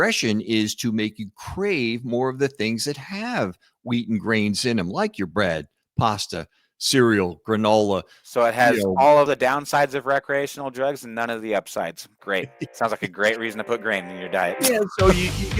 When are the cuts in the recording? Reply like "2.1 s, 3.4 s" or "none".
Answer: 9.3 s

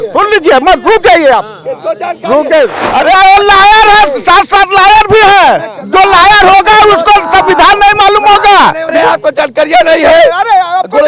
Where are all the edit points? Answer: 2.8 s, 8.9 s

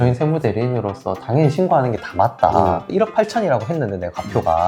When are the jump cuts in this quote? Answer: 2.8 s

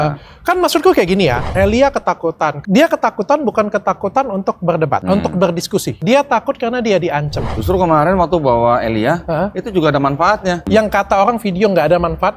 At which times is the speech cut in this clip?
1.4 s, 2.6 s, 5.0 s, 5.9 s, 7.4 s, 10.6 s

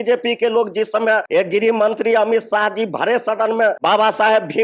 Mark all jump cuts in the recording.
1.2 s, 3.8 s

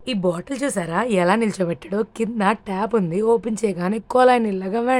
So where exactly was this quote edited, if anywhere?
none

